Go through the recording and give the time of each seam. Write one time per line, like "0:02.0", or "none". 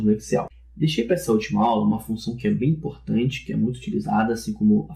0:03.5

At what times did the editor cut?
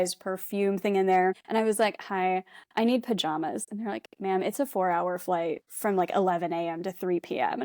0:01.4
0:05.7

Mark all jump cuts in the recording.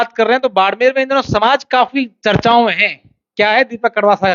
none

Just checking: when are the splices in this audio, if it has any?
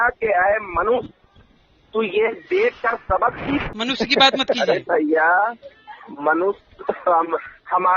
0:03.7

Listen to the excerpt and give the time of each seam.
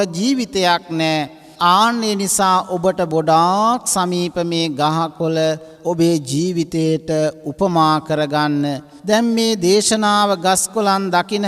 0:01.4
0:05.7
0:08.9

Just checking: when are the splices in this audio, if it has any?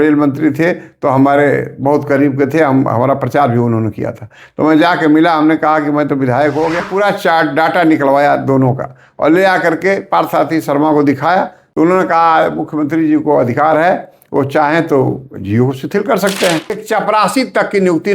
0:06.8
0:11.6
0:16.8

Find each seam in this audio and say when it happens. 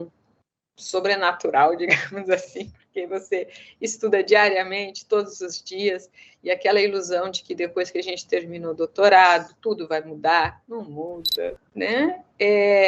0:11.6

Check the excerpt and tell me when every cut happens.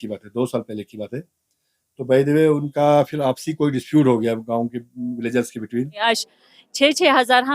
0:06.0

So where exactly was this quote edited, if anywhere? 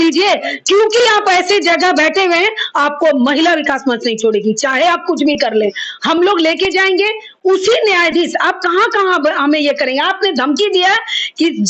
none

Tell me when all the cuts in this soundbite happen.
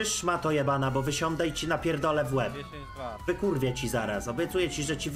none

